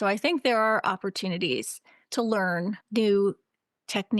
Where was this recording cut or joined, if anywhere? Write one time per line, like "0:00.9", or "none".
0:02.8